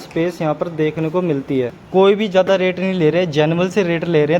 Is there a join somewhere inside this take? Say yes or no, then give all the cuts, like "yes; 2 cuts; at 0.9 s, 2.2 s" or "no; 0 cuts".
yes; 1 cut; at 1.8 s